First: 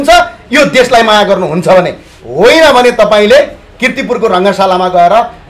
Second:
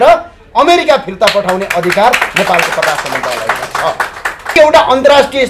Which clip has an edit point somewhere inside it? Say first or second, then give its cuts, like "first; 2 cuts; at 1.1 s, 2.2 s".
second; 1 cut; at 4.6 s